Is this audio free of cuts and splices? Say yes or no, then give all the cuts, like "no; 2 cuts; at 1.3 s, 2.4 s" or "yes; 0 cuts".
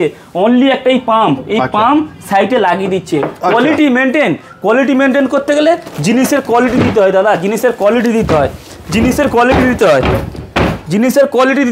yes; 0 cuts